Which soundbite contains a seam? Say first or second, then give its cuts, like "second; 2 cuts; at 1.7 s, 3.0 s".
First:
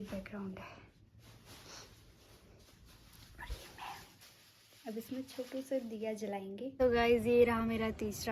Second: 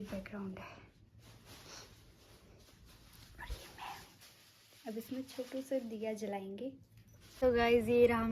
first; 1 cut; at 6.7 s